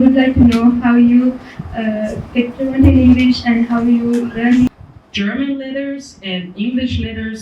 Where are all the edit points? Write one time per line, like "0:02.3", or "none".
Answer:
0:04.7